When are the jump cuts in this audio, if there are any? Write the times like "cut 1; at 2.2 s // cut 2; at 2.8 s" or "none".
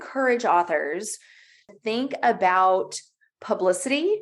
cut 1; at 1.6 s